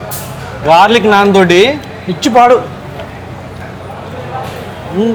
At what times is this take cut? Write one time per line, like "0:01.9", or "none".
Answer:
none